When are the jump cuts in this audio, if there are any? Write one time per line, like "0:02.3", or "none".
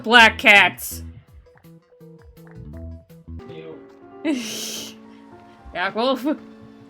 0:03.4